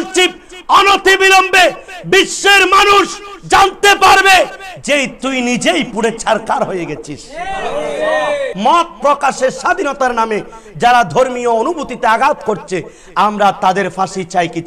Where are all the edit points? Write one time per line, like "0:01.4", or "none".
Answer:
0:08.5